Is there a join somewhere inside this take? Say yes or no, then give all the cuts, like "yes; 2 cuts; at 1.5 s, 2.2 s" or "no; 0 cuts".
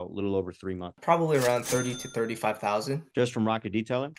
yes; 2 cuts; at 1.0 s, 3.0 s